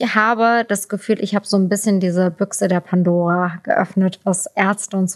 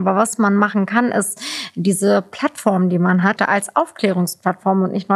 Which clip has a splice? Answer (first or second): second